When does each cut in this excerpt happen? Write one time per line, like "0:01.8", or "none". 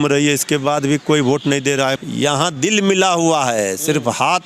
0:01.9